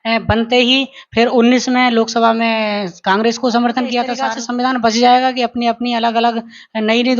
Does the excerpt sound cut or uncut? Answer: cut